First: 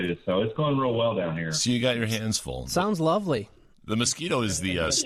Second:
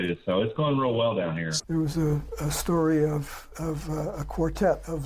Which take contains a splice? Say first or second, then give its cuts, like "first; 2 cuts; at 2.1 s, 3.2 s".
second; 1 cut; at 1.5 s